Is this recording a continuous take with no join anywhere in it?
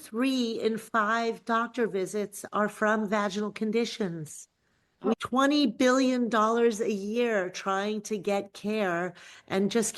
no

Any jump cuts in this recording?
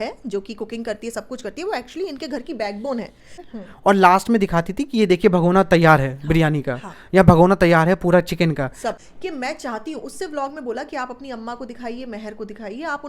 yes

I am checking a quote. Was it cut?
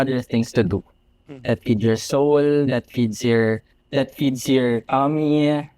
yes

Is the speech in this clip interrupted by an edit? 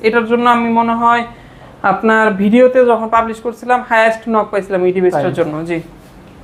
no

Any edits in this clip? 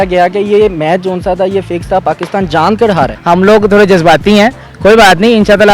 yes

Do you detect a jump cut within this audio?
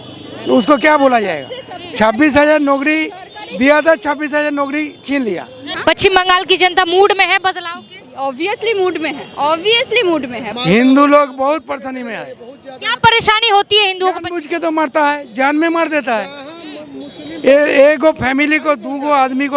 yes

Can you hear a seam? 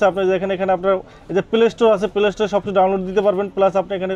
no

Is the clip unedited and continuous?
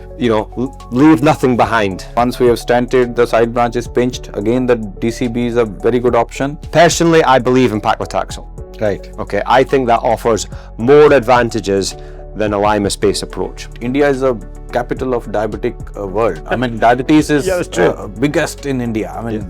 no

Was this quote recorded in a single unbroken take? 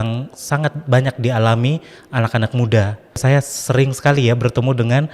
no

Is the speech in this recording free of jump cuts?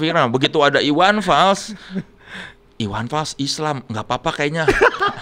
yes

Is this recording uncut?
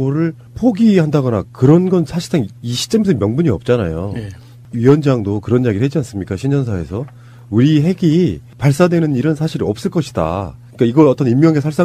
no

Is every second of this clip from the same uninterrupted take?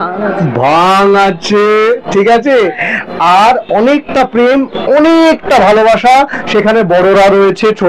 yes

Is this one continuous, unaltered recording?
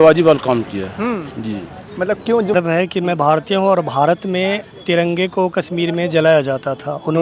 no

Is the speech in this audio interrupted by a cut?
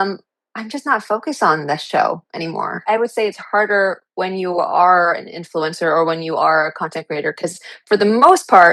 yes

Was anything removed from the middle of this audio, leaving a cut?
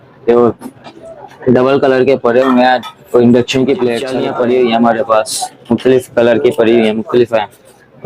yes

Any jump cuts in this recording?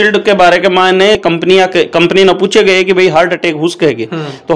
yes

